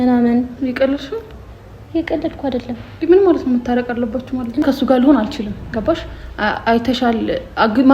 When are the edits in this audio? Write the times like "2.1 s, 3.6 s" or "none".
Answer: 4.6 s